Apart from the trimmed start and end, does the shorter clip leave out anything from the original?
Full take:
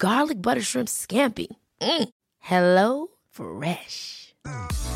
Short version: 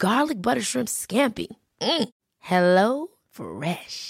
no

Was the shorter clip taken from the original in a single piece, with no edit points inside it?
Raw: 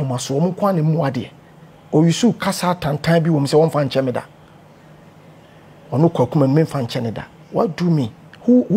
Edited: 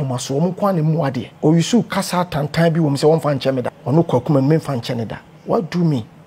no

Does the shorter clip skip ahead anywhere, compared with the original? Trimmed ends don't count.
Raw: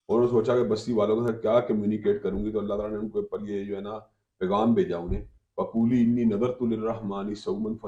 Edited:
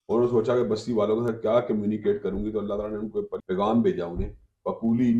yes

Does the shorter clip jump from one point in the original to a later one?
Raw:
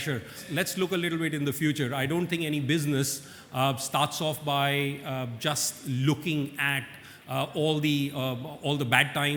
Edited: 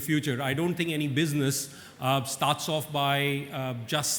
no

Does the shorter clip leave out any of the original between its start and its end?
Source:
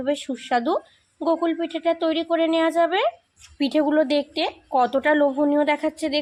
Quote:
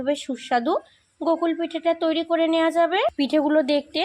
yes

